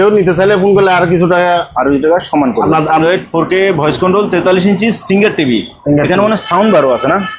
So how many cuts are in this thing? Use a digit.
1